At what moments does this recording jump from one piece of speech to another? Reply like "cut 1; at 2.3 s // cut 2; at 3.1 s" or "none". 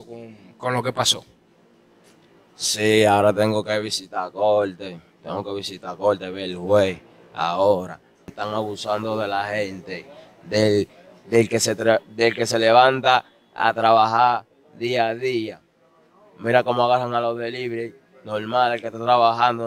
cut 1; at 8.2 s